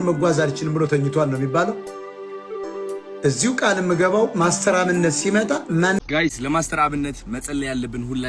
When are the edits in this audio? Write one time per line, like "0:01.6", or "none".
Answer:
0:06.0